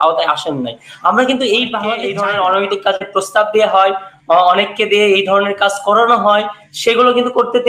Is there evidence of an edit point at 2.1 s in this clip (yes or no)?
yes